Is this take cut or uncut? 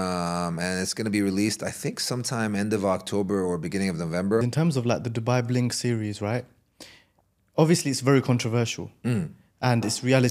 cut